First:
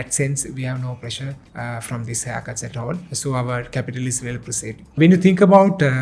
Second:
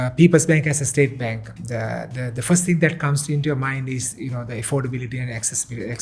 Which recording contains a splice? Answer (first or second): first